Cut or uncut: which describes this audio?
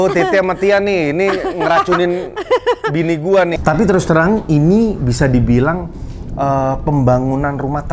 cut